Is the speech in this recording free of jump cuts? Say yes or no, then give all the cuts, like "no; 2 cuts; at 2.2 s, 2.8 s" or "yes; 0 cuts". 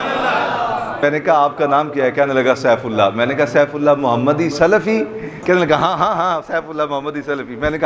no; 2 cuts; at 1.0 s, 5.3 s